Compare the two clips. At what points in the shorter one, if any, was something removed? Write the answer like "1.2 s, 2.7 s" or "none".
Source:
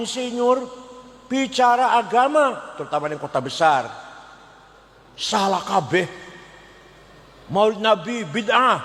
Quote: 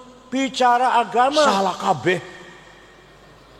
1.5 s

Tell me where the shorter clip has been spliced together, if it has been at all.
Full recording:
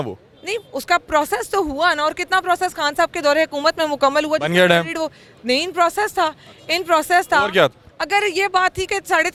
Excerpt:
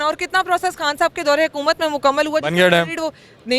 none

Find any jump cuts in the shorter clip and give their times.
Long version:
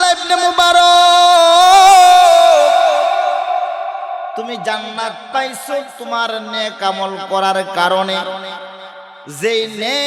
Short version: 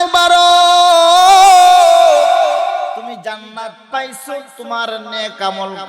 3.0 s

